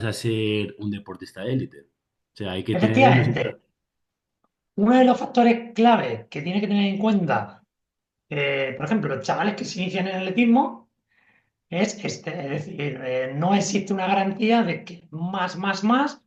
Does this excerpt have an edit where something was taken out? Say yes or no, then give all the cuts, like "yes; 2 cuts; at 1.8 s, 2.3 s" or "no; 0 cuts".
no; 0 cuts